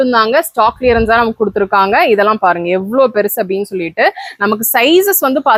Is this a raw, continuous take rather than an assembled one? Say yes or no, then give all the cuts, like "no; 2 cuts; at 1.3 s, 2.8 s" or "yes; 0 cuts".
yes; 0 cuts